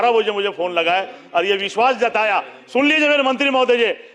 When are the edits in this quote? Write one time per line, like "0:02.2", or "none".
none

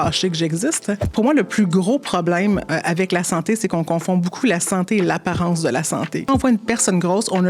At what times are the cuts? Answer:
0:01.1
0:06.2

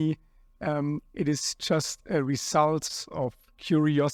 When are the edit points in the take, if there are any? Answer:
none

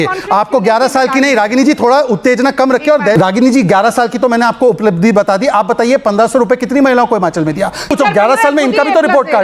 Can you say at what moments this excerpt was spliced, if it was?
0:03.2
0:07.9

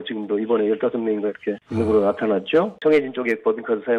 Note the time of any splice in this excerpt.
0:01.6
0:02.7

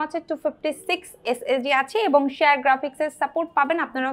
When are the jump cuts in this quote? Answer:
none

